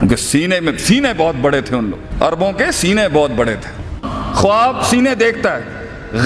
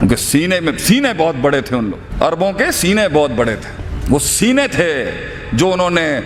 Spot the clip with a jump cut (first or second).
first